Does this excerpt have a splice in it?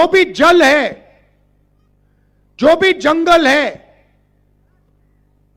no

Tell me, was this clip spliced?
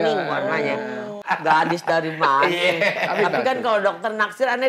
yes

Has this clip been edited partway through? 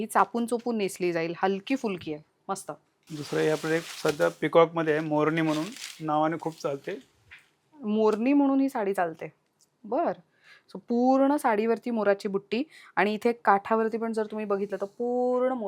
no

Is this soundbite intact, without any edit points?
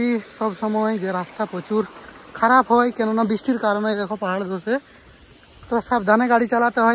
yes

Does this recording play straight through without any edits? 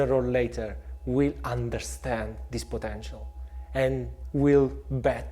no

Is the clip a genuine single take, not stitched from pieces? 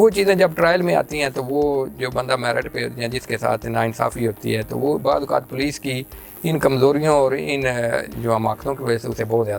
yes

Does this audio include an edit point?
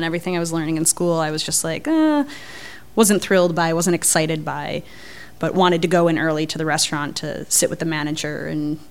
no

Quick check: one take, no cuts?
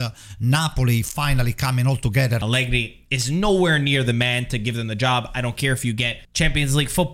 no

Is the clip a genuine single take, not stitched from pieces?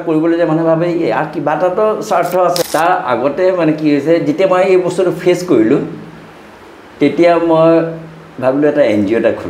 no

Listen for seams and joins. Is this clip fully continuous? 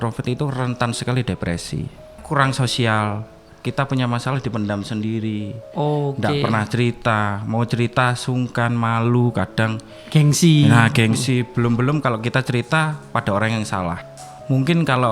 no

